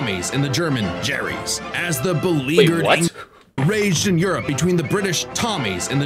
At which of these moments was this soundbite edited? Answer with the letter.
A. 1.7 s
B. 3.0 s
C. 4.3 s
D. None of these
A